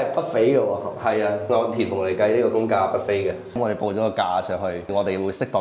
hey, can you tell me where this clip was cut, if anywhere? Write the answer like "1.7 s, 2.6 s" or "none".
3.6 s, 4.9 s